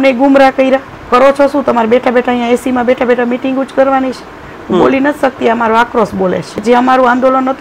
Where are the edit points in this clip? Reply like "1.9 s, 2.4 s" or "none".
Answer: 1.0 s, 6.5 s